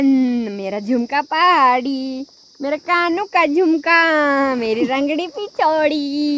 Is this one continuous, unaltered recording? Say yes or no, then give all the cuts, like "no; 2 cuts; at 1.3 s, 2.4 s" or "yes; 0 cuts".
yes; 0 cuts